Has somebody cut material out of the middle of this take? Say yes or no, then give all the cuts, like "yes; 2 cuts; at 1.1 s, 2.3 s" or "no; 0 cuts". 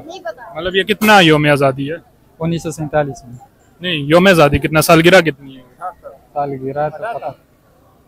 no; 0 cuts